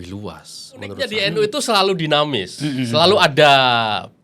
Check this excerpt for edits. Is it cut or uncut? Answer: cut